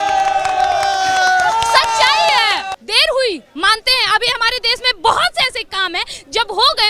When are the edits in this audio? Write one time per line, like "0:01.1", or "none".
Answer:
0:02.8